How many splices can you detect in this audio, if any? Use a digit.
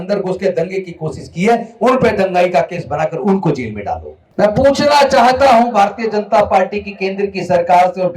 1